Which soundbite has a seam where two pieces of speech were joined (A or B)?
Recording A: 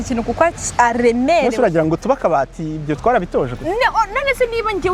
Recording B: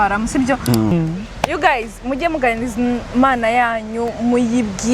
B